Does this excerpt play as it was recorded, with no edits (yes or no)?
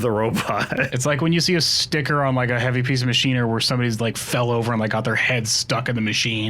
no